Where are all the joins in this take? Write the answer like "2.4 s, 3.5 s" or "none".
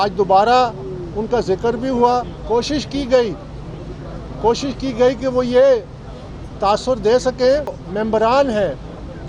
2.3 s, 7.8 s